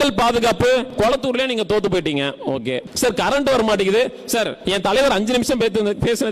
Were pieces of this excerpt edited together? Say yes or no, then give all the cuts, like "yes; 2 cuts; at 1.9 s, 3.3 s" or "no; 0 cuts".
yes; 3 cuts; at 0.9 s, 2.9 s, 4.6 s